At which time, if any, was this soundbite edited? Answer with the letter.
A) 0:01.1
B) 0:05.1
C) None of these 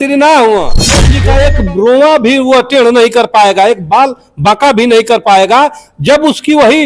A